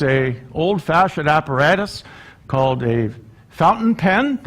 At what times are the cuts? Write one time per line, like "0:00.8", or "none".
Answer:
0:01.9